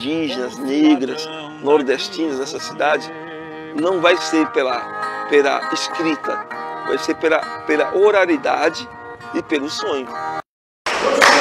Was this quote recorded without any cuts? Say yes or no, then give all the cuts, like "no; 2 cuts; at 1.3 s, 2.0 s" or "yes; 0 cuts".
yes; 0 cuts